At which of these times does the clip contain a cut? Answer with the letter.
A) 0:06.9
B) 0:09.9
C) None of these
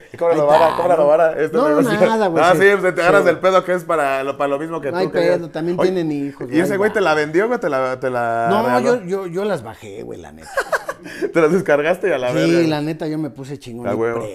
C